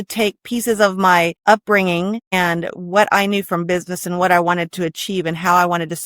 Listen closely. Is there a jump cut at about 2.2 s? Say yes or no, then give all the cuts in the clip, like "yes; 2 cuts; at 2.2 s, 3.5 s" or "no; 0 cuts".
yes; 2 cuts; at 1.4 s, 2.2 s